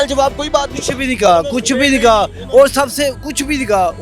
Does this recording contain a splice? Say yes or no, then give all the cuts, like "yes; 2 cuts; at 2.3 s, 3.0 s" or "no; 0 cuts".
no; 0 cuts